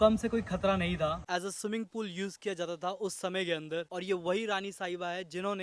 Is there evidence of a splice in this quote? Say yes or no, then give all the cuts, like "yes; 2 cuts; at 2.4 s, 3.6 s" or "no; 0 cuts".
yes; 2 cuts; at 1.2 s, 3.9 s